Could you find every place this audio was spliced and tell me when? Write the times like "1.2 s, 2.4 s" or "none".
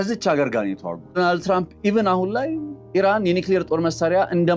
1.1 s, 2.7 s